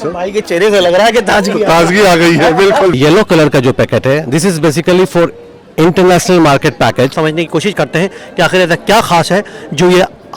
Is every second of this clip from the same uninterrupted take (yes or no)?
no